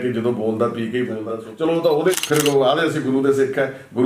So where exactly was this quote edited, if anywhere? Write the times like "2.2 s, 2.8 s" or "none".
1.2 s, 2.2 s